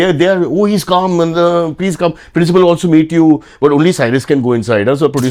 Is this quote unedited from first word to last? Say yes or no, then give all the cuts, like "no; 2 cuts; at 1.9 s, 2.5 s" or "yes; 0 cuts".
yes; 0 cuts